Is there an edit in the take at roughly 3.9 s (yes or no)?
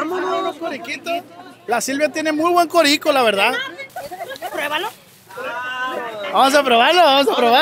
yes